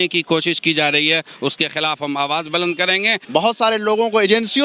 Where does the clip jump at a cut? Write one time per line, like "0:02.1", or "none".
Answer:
0:03.2